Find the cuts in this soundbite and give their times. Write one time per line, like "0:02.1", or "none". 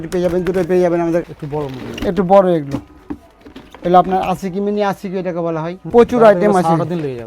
0:01.3
0:05.8